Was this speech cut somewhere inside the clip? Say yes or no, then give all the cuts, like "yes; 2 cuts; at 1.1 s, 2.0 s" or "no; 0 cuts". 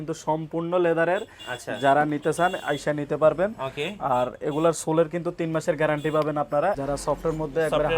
yes; 1 cut; at 6.8 s